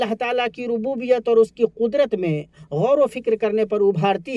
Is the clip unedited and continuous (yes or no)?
yes